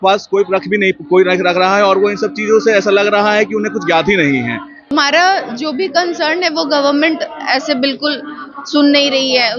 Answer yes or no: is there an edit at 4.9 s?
yes